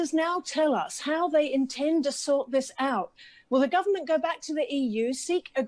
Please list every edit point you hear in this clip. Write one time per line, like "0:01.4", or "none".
0:03.1